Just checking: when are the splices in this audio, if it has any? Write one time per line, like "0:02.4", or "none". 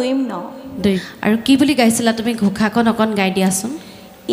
0:01.1

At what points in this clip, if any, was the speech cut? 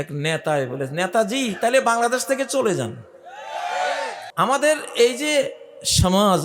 0:04.2

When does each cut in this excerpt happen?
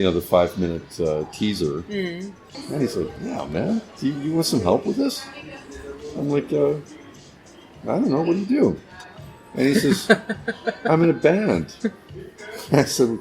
0:02.4

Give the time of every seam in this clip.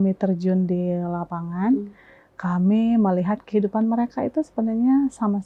none

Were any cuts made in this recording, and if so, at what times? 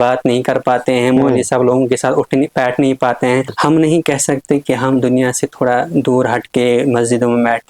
0:03.5

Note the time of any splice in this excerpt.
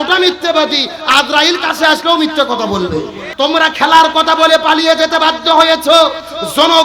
0:03.2

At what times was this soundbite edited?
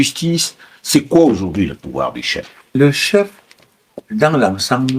0:02.7

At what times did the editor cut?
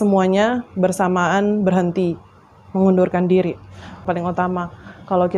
0:04.0

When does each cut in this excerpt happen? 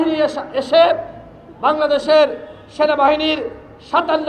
none

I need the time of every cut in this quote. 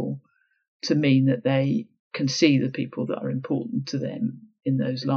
none

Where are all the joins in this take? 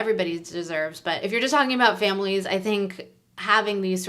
0:01.2

